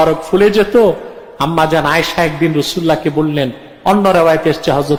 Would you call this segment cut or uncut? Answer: uncut